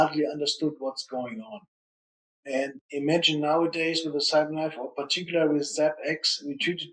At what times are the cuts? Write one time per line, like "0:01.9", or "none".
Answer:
0:02.8

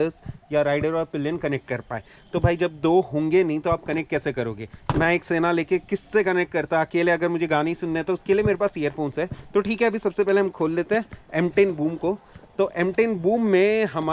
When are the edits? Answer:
none

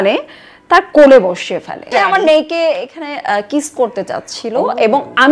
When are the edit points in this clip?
0:01.9

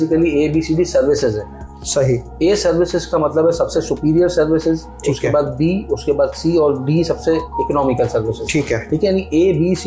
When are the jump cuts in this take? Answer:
none

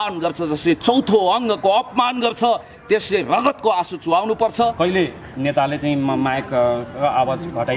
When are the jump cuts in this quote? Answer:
0:04.7

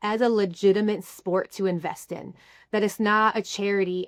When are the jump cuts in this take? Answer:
none

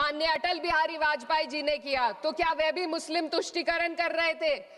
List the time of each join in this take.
none

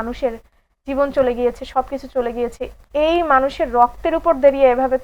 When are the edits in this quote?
none

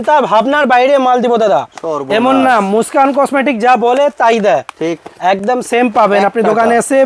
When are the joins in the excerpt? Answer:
none

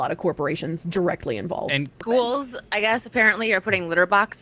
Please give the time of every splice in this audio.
0:01.9

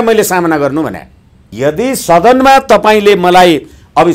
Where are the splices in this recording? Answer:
0:01.4

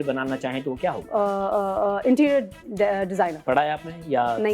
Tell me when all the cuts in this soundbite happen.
0:01.0
0:03.4

